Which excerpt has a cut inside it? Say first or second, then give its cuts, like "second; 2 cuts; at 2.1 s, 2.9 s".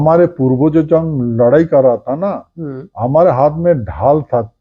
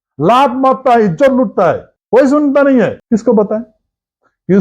second; 2 cuts; at 1.9 s, 3.0 s